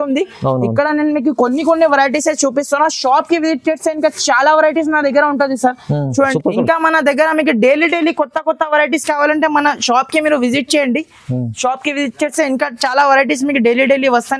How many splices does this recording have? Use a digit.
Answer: 1